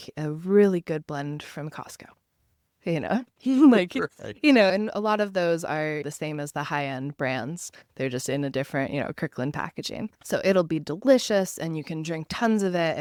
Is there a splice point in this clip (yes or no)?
no